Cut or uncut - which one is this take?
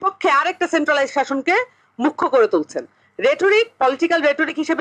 uncut